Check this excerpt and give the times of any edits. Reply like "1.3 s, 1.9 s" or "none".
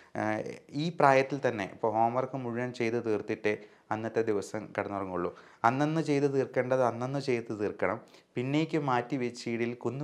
none